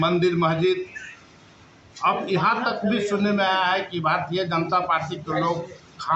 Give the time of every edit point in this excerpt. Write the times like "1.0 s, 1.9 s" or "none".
none